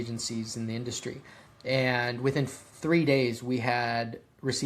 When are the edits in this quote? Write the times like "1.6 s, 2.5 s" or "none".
none